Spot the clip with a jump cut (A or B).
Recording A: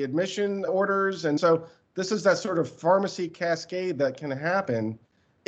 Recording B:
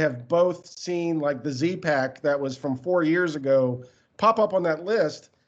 A